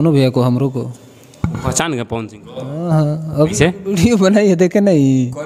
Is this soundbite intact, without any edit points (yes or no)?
yes